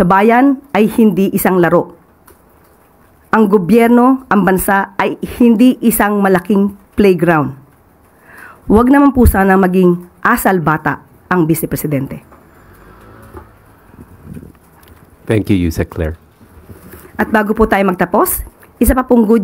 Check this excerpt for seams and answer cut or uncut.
uncut